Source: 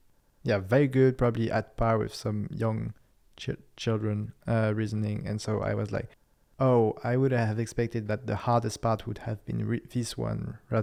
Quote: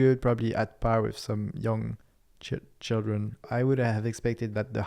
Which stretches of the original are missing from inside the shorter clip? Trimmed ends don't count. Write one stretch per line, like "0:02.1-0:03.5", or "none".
0:04.4-0:07.0